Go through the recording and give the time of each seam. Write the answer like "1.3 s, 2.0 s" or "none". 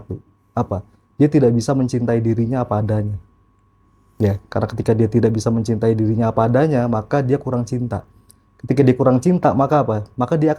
none

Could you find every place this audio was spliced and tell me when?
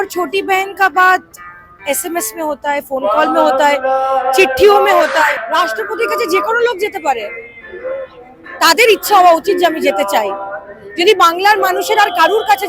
5.4 s

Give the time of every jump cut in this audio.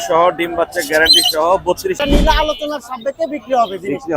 2.0 s

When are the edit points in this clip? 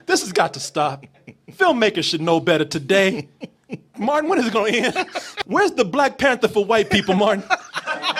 5.4 s

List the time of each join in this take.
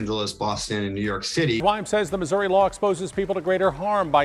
1.6 s

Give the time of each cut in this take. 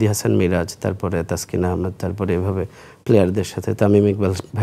none

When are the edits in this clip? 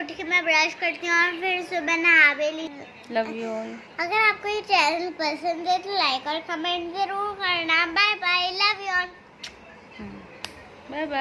2.7 s

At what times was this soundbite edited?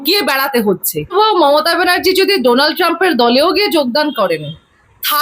1.1 s

